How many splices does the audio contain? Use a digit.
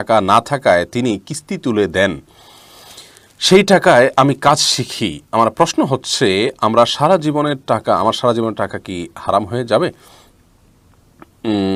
0